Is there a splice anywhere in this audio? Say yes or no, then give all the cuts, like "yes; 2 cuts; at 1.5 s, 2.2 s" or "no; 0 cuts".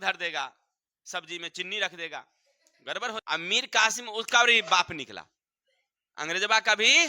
yes; 1 cut; at 3.2 s